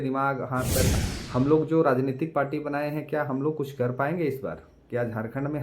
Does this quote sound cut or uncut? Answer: cut